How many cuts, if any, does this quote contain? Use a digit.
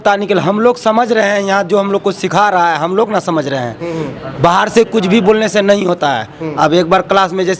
0